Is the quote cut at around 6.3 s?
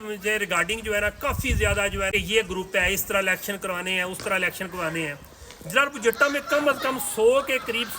no; 1 cut; at 2.1 s

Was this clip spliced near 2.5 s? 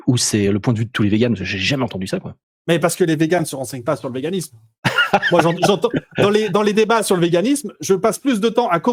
no; 0 cuts

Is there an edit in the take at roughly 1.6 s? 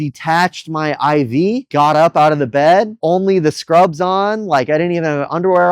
yes; 2 cuts; at 1.6 s, 2.9 s

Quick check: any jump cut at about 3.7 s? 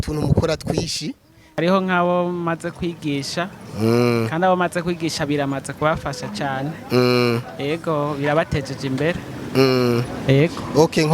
no; 1 cut; at 1.6 s

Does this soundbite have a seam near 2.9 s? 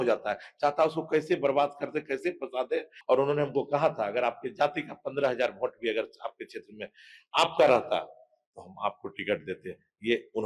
yes; 1 cut; at 2.9 s

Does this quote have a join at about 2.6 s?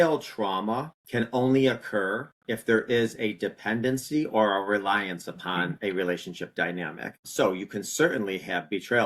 no; 2 cuts; at 1.0 s, 7.2 s

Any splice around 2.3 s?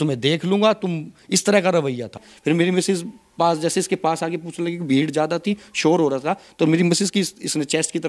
yes; 1 cut; at 2.3 s

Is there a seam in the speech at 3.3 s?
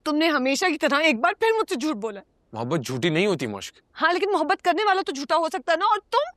no; 0 cuts

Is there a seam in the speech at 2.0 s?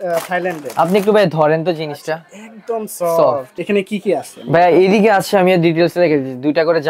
no; 1 cut; at 3.5 s

